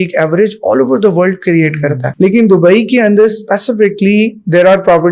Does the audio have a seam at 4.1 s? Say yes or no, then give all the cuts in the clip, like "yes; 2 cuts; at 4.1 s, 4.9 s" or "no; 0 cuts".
no; 1 cut; at 2.1 s